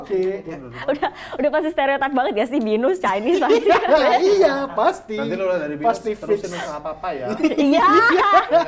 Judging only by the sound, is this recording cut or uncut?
uncut